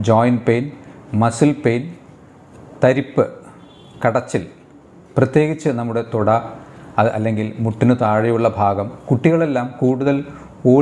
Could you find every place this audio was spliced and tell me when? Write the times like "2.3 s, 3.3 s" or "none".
none